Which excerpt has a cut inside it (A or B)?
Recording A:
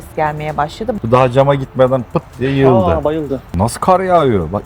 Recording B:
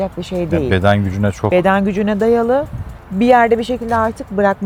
A